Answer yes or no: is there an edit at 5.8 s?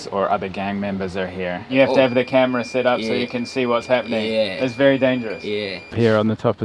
yes